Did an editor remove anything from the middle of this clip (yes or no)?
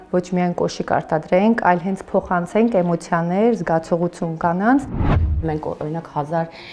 yes